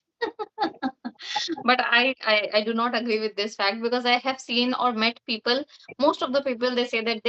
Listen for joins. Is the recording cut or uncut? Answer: uncut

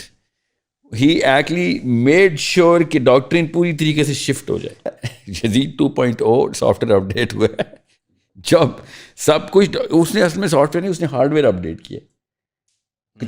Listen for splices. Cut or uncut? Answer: cut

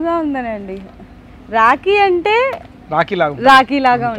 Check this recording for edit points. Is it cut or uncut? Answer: uncut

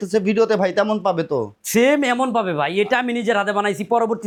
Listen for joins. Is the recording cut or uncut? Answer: uncut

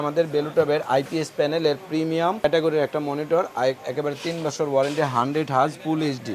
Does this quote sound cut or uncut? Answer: cut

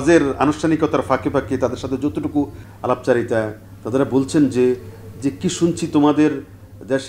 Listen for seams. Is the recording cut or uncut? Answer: cut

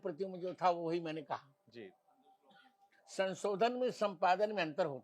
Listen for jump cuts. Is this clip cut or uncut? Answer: uncut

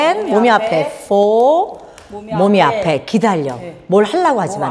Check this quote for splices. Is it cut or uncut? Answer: uncut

